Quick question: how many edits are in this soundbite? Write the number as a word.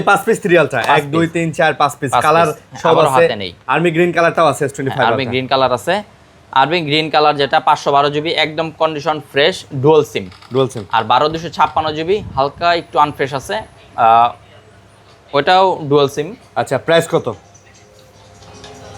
zero